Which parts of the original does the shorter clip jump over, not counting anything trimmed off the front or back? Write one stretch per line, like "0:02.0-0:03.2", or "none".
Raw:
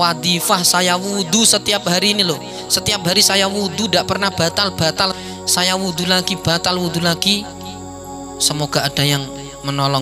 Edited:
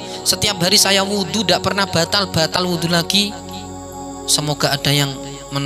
0:05.0-0:06.7